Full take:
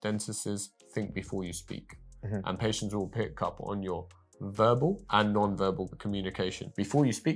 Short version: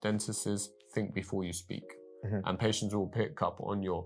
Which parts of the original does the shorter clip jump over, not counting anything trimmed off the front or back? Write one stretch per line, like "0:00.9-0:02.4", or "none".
none